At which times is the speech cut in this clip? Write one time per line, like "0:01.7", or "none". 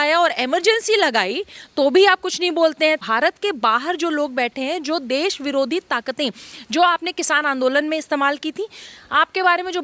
0:03.0